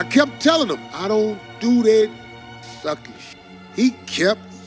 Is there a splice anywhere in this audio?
yes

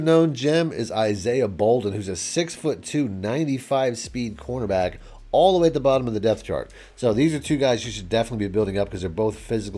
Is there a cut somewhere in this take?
no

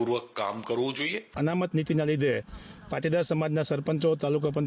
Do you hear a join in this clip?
yes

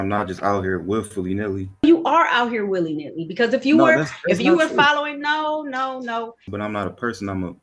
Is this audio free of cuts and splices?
no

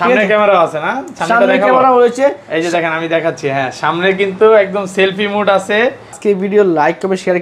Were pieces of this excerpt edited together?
yes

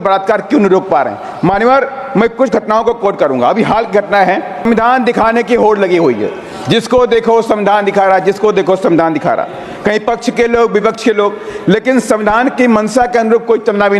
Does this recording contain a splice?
yes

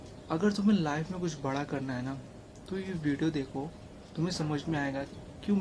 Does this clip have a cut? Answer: no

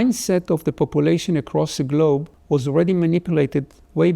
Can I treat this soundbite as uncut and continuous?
no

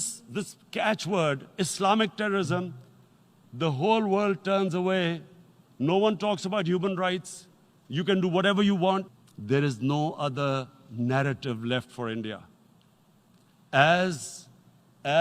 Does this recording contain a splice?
yes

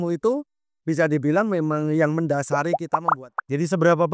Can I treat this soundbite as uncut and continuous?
no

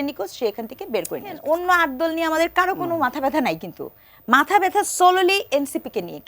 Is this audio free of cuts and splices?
no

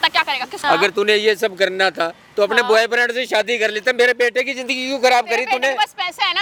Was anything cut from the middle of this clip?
no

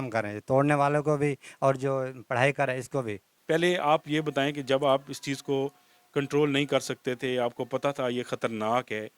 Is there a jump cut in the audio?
yes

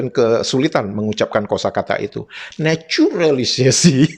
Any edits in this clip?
yes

